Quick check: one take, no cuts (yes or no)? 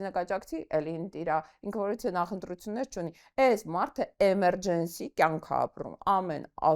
yes